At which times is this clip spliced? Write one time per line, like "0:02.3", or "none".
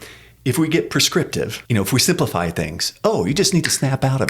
0:01.6